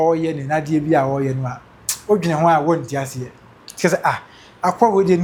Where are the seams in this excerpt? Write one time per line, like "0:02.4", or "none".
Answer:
none